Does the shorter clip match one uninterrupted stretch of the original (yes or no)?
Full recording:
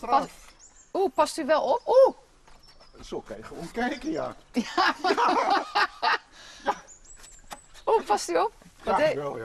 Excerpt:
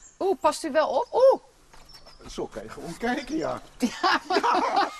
yes